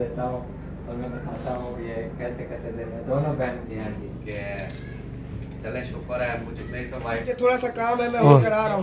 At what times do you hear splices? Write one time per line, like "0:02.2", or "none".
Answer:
0:03.7
0:07.3